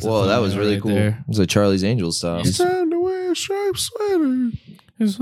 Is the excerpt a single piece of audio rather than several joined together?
no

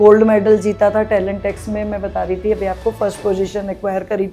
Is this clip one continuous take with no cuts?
yes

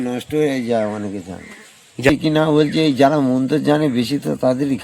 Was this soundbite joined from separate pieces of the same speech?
yes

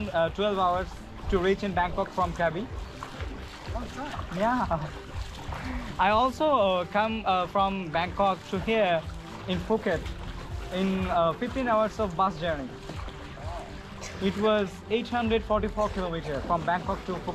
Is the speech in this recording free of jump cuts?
yes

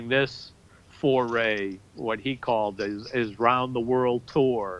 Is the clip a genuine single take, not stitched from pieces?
yes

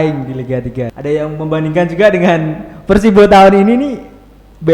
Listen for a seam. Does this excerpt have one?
yes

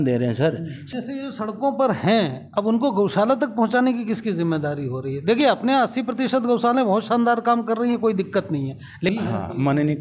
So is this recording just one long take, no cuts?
no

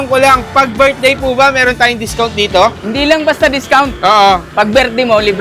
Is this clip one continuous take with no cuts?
no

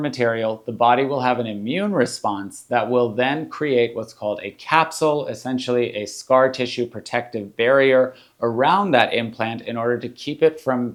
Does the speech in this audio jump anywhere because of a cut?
no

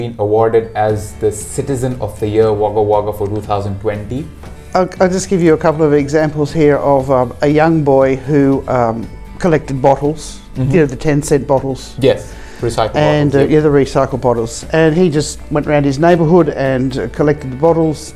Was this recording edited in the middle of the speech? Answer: yes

